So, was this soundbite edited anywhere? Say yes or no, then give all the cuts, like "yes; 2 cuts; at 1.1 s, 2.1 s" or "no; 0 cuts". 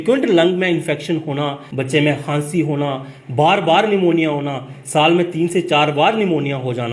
yes; 1 cut; at 1.7 s